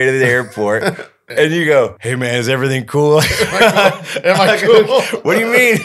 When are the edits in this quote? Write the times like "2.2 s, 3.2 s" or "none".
1.2 s, 2.0 s